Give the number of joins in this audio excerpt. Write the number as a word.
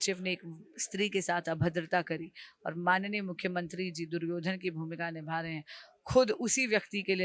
zero